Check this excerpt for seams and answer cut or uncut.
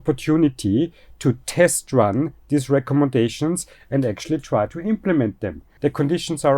cut